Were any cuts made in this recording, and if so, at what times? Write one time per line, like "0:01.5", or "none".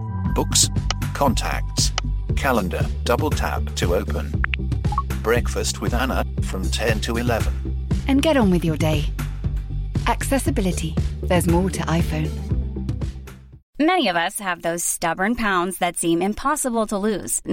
0:13.6

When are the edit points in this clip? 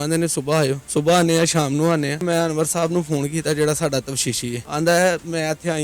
0:00.8
0:02.2
0:04.7

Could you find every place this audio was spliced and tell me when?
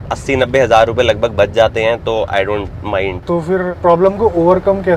none

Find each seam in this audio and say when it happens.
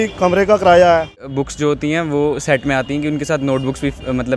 0:01.3

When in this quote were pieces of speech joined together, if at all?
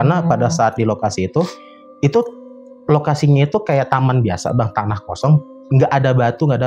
none

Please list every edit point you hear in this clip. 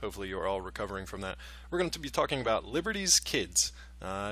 0:02.5

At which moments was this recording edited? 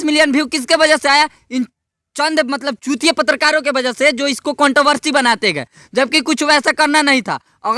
none

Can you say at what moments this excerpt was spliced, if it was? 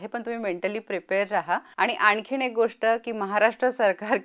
0:01.7

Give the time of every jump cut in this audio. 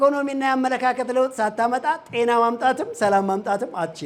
none

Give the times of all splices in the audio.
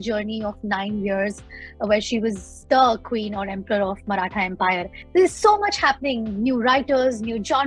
0:04.9

